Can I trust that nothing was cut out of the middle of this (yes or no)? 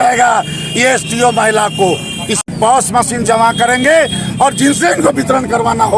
no